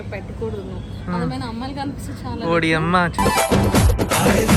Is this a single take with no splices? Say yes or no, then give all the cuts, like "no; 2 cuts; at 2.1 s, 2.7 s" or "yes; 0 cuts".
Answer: yes; 0 cuts